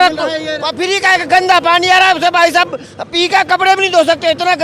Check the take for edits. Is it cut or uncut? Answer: uncut